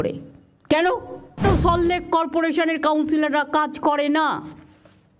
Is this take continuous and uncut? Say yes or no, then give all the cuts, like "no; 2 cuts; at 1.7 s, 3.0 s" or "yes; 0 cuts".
no; 1 cut; at 1.4 s